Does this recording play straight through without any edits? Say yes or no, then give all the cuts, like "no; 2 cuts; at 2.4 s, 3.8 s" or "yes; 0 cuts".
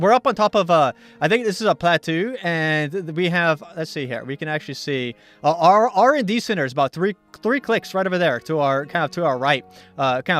no; 1 cut; at 4.8 s